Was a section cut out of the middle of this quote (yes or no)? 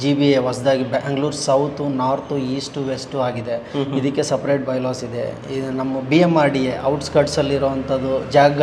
no